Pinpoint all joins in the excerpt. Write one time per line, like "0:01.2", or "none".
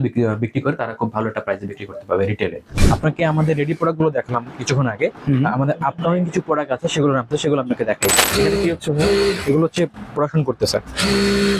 0:02.7
0:08.2